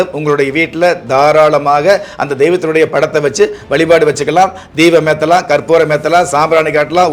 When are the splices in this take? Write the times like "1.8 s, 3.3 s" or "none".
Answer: none